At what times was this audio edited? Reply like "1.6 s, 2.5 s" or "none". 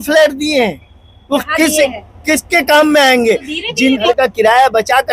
4.0 s